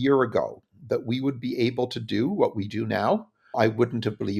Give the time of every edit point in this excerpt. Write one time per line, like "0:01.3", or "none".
0:03.4